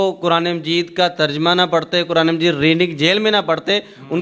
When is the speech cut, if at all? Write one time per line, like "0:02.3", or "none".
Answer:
none